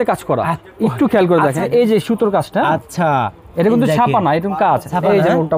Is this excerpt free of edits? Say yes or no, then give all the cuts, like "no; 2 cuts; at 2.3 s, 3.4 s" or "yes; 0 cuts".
no; 1 cut; at 1.6 s